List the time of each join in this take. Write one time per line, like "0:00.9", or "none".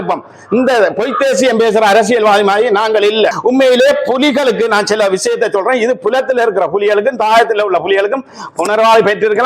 0:03.4